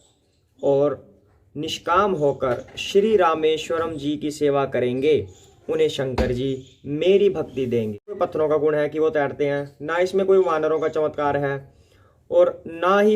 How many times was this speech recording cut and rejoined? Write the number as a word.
one